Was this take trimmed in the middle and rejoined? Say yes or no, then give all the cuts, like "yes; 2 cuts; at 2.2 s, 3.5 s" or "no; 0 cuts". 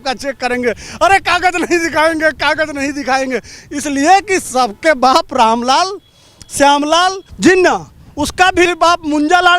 yes; 2 cuts; at 7.3 s, 8.7 s